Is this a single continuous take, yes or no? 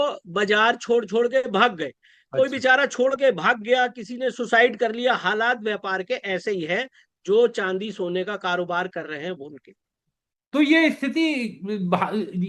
yes